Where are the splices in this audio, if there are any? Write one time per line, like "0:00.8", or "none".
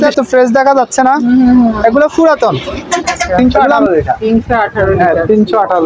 0:03.4